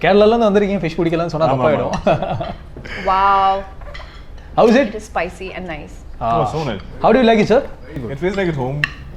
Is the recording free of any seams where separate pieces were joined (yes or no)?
yes